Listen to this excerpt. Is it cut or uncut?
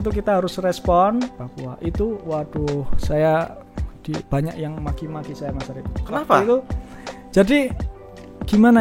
cut